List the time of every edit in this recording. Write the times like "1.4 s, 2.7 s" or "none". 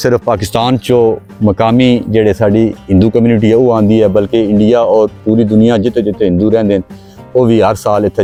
none